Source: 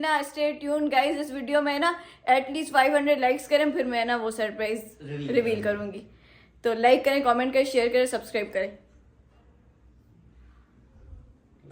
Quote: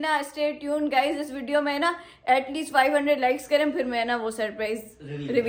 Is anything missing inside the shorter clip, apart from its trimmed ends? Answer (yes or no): no